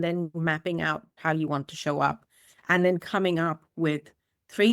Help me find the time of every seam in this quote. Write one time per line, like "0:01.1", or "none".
0:01.1